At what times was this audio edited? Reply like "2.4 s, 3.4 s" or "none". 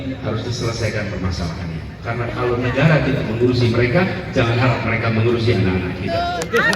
none